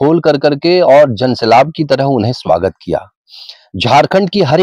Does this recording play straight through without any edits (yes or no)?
yes